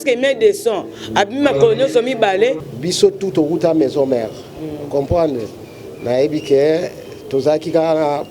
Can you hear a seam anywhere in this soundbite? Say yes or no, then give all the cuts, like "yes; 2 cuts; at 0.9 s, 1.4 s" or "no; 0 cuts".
yes; 1 cut; at 2.6 s